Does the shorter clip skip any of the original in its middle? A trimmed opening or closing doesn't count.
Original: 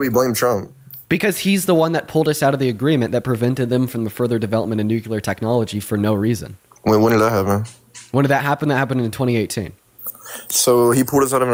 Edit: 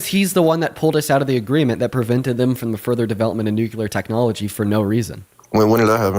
no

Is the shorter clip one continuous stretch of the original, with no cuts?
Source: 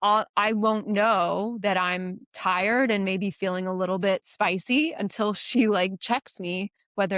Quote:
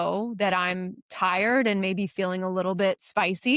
yes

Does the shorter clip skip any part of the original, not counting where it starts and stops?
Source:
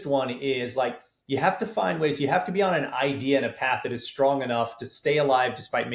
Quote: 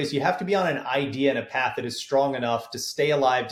no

